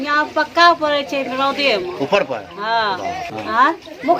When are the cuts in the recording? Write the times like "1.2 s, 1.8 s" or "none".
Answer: 3.3 s